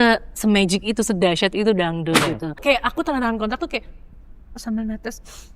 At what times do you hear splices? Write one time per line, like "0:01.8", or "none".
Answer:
0:02.6

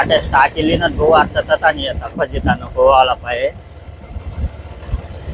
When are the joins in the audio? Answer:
none

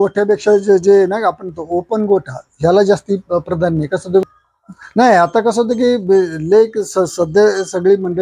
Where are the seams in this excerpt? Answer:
0:04.2

